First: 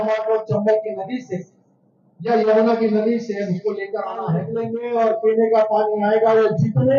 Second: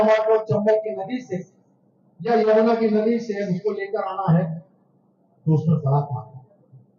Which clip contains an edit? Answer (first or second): first